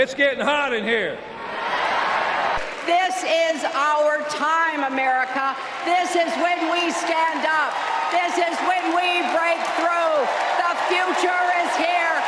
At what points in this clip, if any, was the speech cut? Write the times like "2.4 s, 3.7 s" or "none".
2.6 s

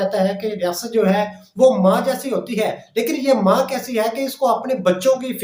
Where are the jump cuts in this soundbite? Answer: none

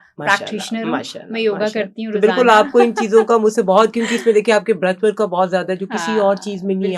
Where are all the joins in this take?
none

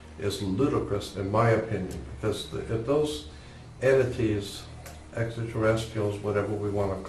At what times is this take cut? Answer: 4.4 s

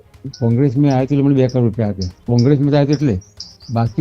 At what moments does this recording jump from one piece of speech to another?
2.1 s

